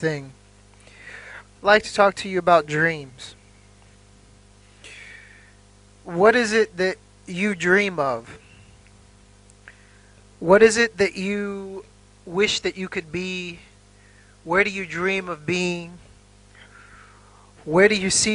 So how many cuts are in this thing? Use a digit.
1